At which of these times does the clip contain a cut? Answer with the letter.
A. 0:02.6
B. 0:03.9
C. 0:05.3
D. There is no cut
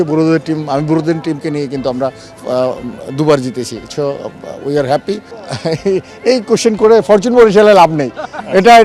C